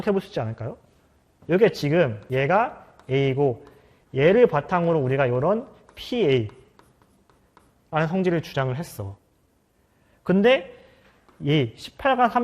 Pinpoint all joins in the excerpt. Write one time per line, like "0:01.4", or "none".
0:02.2